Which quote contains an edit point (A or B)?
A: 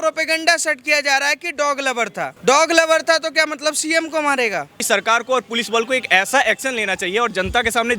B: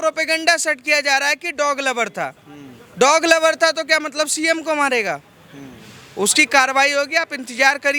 A